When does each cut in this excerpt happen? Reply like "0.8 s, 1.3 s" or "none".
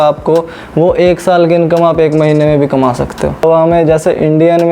3.4 s